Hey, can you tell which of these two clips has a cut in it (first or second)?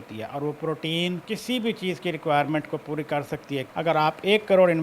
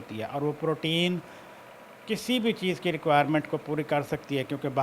first